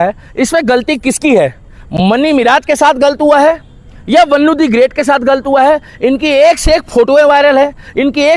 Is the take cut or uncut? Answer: uncut